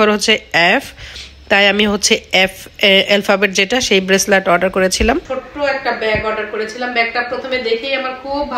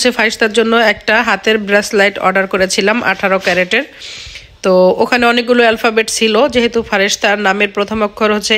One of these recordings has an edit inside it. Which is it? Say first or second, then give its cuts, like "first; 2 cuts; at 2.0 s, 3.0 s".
first; 1 cut; at 5.4 s